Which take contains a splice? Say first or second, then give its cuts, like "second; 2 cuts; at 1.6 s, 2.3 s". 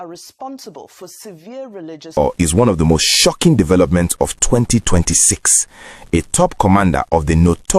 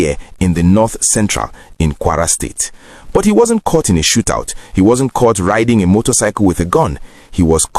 first; 1 cut; at 2.2 s